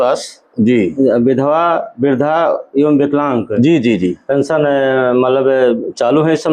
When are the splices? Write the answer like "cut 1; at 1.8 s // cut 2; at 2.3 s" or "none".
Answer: none